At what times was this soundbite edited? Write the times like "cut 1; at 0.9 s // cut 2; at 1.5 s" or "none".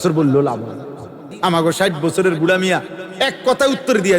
cut 1; at 1.2 s